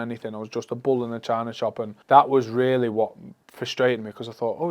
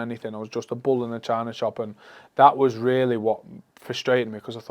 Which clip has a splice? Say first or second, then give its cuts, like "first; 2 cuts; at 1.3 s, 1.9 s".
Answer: first; 1 cut; at 1.9 s